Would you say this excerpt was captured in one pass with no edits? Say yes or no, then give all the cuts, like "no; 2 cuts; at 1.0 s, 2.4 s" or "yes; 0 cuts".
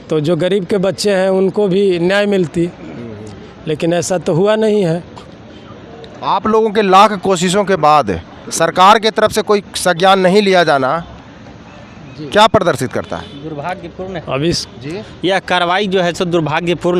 yes; 0 cuts